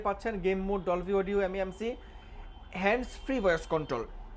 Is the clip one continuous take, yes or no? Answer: yes